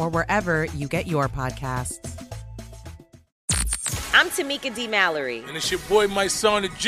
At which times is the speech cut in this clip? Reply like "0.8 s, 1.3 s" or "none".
3.2 s

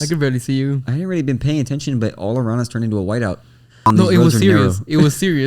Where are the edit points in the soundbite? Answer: 3.9 s

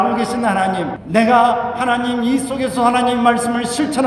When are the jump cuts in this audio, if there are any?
1.0 s

